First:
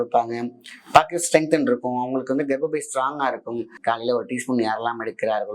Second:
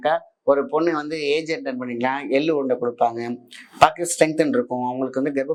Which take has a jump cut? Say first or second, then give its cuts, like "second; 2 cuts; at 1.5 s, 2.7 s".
first; 1 cut; at 3.7 s